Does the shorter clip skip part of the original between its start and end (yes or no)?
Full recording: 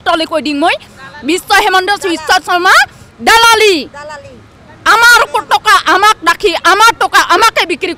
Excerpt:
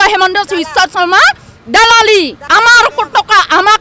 yes